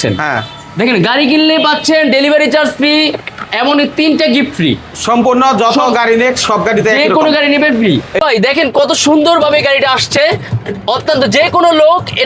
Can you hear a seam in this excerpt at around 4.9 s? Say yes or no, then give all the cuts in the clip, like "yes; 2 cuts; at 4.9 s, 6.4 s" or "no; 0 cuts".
no; 1 cut; at 8.1 s